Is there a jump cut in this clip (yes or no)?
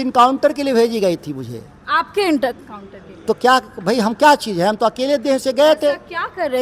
no